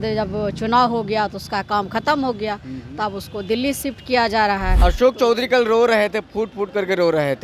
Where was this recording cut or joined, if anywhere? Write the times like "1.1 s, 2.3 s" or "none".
4.7 s